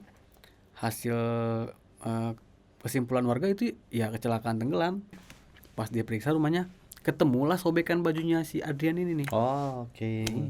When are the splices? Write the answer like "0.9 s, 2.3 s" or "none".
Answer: 5.2 s